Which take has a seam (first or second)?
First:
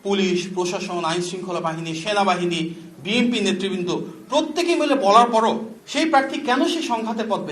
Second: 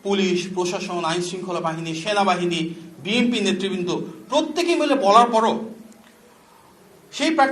first